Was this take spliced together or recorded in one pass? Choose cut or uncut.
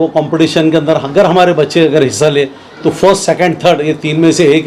uncut